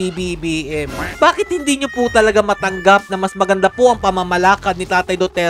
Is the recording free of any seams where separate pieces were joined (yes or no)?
no